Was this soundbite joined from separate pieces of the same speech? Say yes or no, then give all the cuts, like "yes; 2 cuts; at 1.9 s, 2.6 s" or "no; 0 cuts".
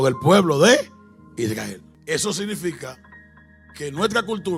yes; 1 cut; at 1.9 s